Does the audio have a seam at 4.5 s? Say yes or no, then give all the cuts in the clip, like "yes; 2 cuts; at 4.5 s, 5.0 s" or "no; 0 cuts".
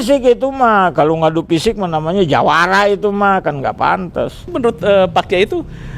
yes; 1 cut; at 4.5 s